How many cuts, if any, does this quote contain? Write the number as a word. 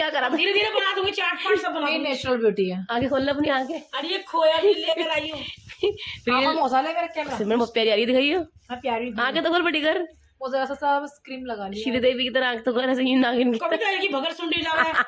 zero